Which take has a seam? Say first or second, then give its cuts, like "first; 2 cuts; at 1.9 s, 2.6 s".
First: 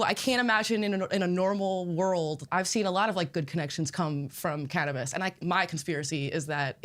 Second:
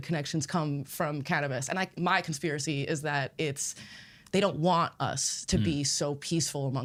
first; 1 cut; at 2.4 s